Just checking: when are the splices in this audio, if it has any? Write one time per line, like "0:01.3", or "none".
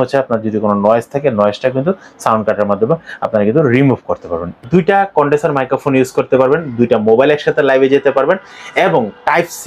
0:04.5